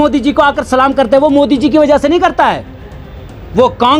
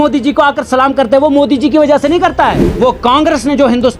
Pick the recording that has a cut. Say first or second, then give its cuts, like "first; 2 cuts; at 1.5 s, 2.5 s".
second; 1 cut; at 2.6 s